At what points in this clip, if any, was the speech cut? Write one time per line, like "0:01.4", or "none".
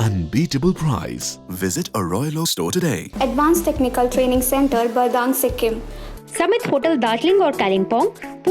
0:03.1
0:06.0